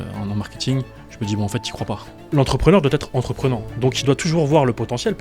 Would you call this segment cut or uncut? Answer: cut